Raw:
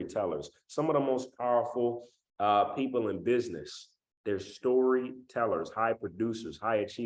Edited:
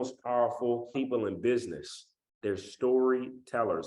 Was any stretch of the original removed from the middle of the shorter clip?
yes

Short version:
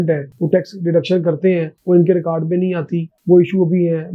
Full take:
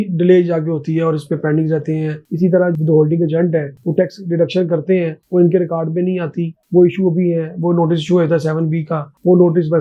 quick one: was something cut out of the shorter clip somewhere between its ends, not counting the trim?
no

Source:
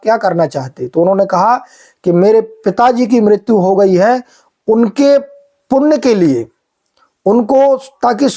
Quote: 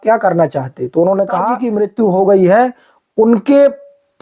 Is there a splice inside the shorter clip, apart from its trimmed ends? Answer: yes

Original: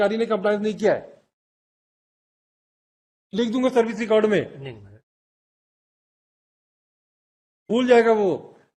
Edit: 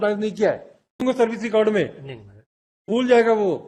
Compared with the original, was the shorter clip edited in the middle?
yes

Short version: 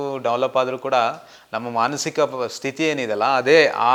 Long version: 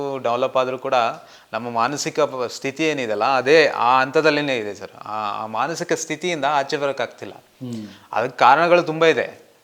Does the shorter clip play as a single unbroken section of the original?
yes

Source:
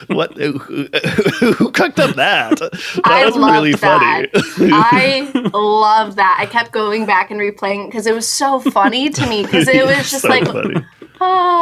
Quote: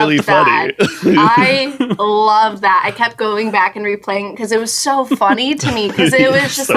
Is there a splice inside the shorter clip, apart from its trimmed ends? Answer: no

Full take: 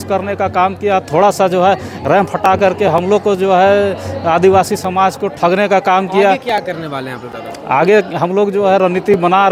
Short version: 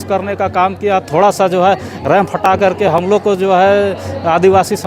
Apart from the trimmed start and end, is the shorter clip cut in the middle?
no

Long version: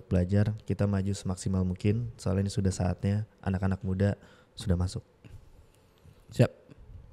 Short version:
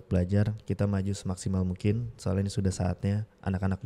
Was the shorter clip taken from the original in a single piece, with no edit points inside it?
yes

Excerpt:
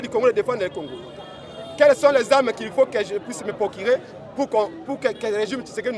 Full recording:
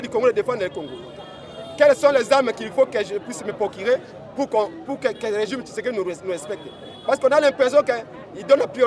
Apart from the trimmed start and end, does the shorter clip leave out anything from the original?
no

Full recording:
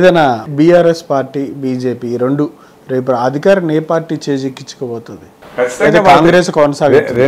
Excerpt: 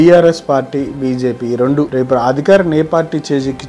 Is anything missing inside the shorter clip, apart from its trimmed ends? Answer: yes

